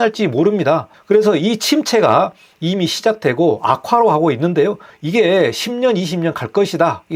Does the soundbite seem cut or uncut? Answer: uncut